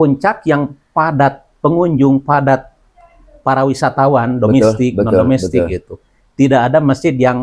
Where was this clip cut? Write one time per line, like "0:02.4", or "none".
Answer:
none